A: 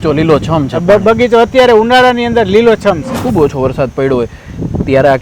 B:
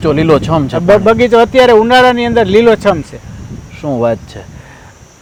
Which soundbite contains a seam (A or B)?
A